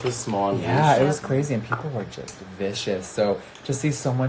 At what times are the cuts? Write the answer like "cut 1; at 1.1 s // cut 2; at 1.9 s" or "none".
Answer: none